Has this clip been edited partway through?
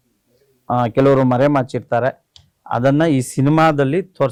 no; 0 cuts

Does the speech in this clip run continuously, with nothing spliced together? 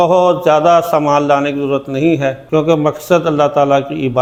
yes; 0 cuts

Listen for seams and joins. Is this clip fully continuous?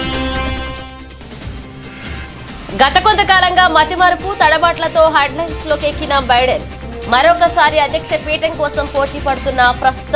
no; 1 cut; at 2.3 s

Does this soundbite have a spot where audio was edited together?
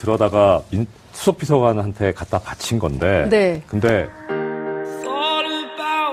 no; 0 cuts

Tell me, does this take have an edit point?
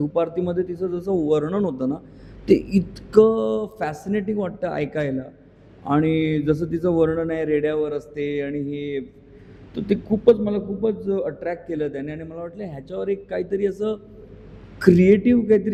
no; 0 cuts

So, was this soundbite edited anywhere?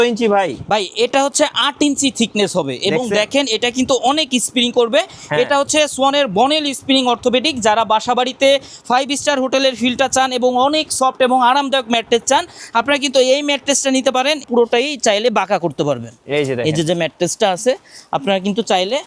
yes; 1 cut; at 14.4 s

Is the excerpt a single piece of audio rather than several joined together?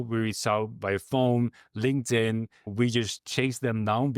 no; 1 cut; at 2.8 s

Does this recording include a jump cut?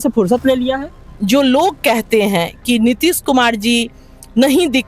yes; 1 cut; at 1.1 s

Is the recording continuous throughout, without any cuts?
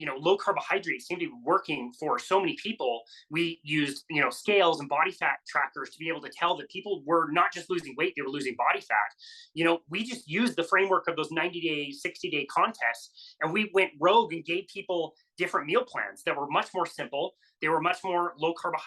yes; 0 cuts

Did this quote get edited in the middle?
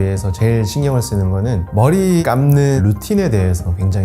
no; 0 cuts

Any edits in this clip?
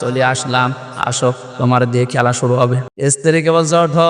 yes; 1 cut; at 2.9 s

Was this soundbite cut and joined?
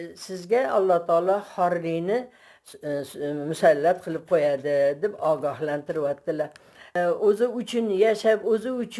yes; 1 cut; at 6.9 s

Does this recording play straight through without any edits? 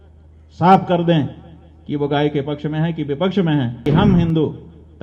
no; 1 cut; at 3.8 s

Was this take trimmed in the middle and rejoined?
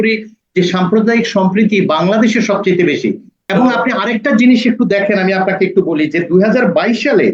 yes; 1 cut; at 3.5 s

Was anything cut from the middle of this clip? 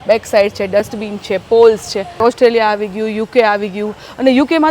yes; 1 cut; at 2.2 s

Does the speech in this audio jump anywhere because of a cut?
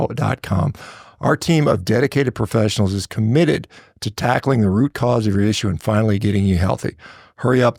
no; 0 cuts

